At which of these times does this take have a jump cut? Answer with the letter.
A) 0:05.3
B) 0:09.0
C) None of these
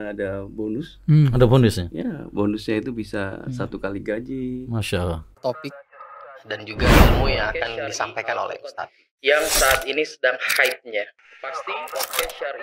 A